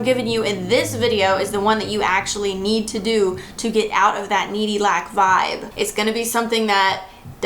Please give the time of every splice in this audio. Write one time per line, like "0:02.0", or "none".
0:05.6